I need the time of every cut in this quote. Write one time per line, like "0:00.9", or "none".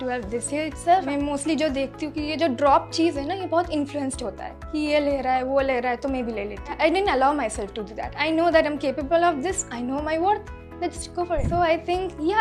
0:01.1
0:06.7
0:08.1
0:11.4